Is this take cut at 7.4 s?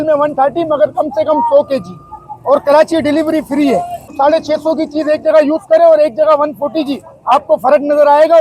no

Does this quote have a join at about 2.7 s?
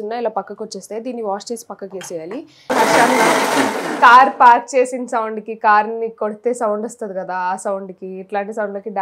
yes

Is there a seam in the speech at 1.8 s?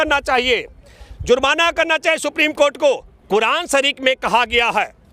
no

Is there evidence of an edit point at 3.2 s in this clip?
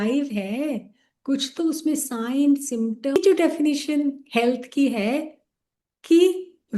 yes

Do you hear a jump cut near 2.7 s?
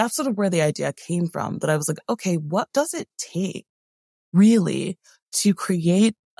yes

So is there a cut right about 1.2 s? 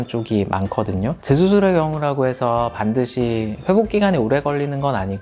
yes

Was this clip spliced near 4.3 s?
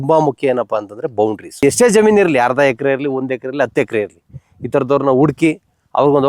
no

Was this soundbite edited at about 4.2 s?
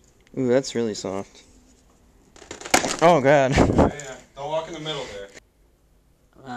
no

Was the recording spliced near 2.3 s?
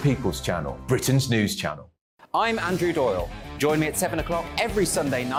no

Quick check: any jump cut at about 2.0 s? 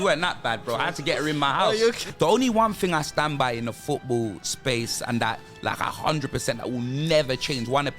yes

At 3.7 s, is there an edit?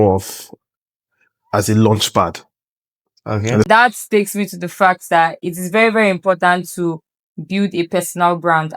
yes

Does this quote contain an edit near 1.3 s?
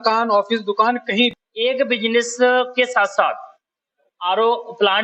yes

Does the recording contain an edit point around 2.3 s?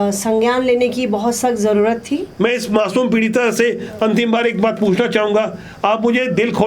yes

